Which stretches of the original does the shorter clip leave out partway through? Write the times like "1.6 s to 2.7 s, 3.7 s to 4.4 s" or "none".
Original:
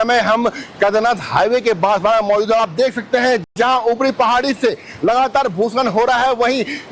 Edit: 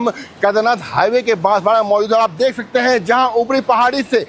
3.4 s to 3.5 s